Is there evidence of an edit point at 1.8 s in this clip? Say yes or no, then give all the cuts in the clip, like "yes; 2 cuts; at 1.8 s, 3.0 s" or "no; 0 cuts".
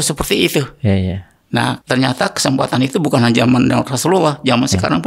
yes; 1 cut; at 1.8 s